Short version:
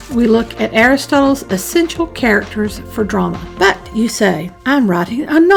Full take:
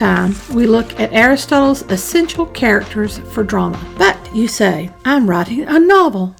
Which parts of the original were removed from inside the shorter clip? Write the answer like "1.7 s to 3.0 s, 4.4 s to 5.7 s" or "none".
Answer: none

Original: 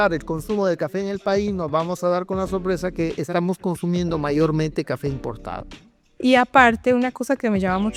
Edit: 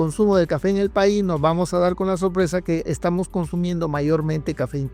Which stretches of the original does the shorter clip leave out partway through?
none

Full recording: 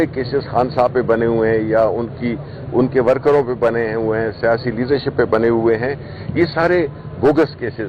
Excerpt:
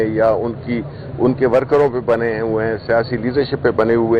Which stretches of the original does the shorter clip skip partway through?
none

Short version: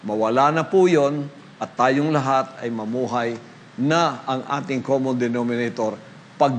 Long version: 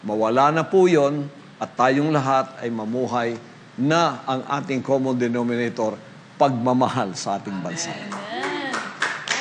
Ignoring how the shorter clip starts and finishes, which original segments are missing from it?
none

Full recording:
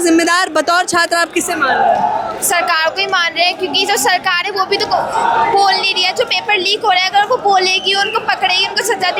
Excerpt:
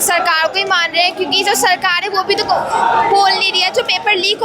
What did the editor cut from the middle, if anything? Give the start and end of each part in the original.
none

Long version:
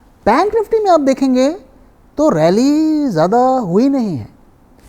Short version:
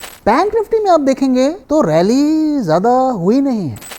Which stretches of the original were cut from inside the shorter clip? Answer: 1.6 s to 2.1 s

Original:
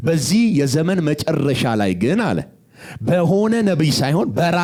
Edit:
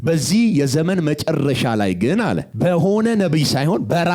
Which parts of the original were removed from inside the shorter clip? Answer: 2.5 s to 2.9 s

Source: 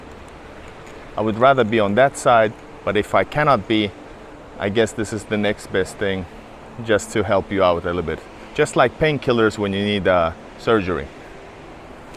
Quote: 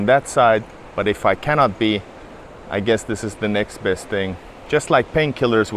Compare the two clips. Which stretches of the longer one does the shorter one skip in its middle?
6.4 s to 8.3 s

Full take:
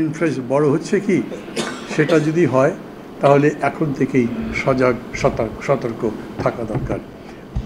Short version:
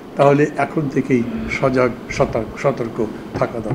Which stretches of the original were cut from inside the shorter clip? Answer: none

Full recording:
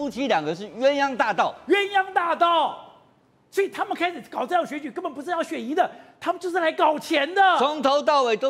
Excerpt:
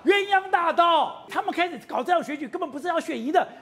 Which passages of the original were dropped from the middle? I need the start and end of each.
2.9 s to 3.7 s

